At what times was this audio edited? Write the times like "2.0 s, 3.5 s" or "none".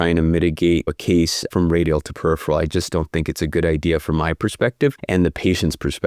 0.9 s, 5.0 s